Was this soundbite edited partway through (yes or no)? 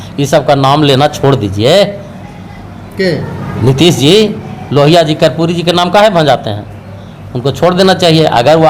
no